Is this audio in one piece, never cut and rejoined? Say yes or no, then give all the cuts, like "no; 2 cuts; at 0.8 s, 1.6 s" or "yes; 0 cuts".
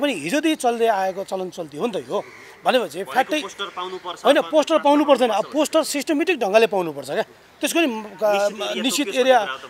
yes; 0 cuts